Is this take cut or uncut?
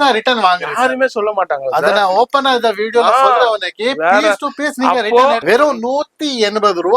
cut